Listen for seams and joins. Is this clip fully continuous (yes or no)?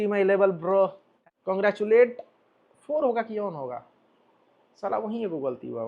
no